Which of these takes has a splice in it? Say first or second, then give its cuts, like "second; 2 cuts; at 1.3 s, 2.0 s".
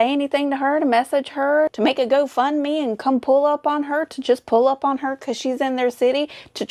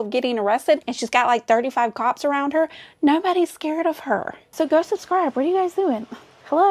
second; 1 cut; at 4.4 s